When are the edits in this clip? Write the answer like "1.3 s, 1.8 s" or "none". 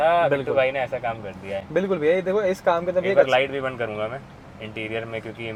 none